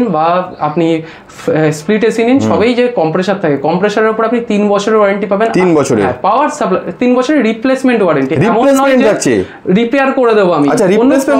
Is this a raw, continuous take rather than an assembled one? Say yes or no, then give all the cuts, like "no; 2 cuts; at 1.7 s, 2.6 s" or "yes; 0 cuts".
yes; 0 cuts